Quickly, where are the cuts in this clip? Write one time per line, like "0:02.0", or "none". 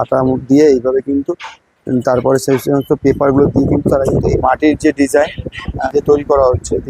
0:04.4
0:05.8